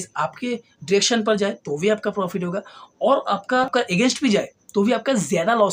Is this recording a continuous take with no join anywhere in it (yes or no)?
no